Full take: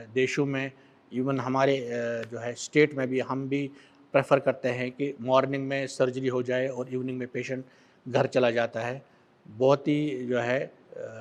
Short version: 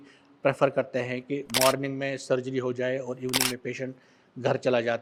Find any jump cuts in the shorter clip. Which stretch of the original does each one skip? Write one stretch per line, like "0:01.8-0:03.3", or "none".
none